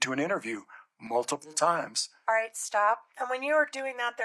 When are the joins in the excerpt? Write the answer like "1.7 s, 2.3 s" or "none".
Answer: 3.1 s